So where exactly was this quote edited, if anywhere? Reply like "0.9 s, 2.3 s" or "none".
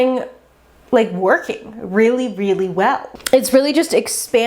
3.1 s